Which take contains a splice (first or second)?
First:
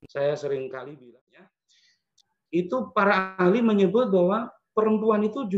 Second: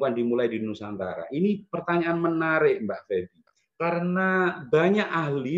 first